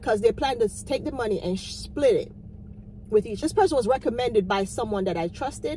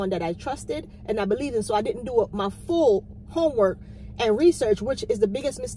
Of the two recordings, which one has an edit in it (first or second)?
first